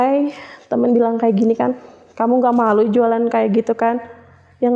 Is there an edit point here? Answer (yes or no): no